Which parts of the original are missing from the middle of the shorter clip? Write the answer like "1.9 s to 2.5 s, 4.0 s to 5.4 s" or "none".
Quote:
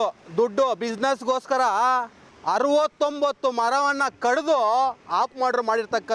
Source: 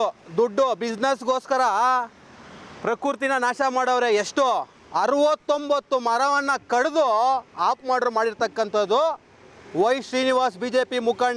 2.3 s to 4.8 s